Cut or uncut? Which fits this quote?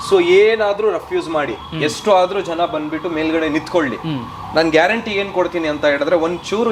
uncut